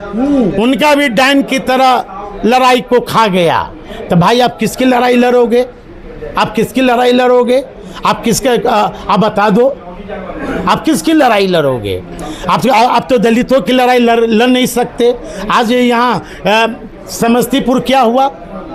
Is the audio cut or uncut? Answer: uncut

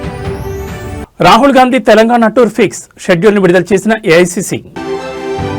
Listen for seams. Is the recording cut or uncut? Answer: uncut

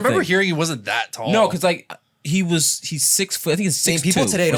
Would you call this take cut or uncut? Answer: uncut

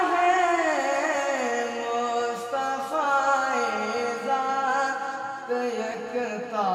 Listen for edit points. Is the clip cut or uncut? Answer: uncut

